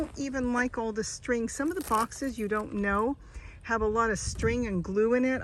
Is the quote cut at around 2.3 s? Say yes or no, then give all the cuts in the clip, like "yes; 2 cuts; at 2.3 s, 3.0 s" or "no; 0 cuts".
no; 0 cuts